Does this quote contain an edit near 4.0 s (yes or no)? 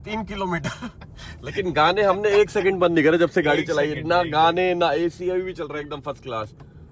no